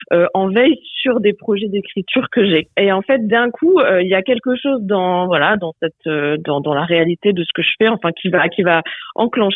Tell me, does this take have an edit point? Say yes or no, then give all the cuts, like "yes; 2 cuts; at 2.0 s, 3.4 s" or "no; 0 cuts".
yes; 1 cut; at 2.7 s